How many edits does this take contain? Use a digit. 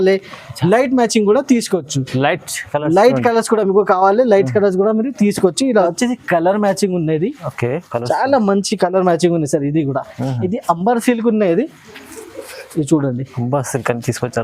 1